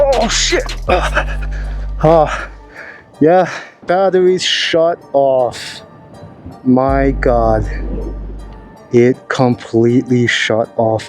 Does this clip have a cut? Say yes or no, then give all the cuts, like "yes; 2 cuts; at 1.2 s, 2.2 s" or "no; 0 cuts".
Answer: yes; 1 cut; at 3.8 s